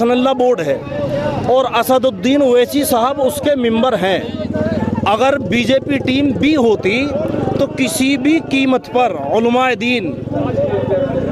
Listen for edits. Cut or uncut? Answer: uncut